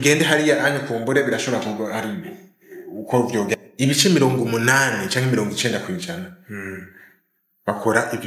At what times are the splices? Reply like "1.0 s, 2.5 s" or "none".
3.6 s